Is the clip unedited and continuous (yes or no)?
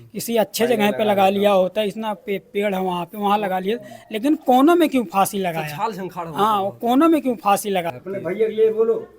no